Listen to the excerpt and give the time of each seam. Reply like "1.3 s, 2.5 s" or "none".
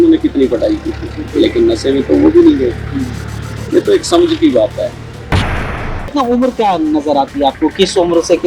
5.6 s